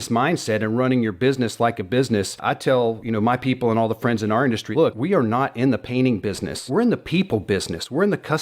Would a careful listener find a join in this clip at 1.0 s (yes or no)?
no